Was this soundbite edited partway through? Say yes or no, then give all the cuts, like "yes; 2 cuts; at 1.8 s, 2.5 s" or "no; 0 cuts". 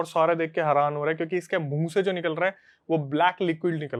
no; 0 cuts